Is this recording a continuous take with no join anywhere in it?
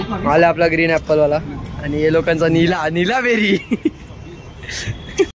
yes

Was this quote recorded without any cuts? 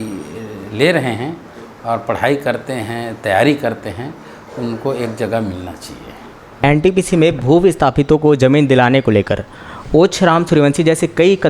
no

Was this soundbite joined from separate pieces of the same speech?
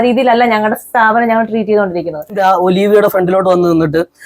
yes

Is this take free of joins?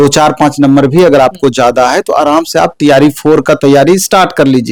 yes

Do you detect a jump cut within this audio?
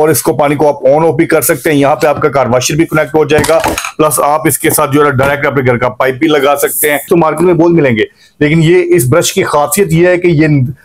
yes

